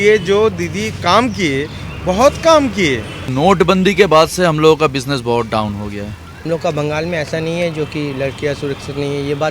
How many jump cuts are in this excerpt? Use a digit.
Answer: 2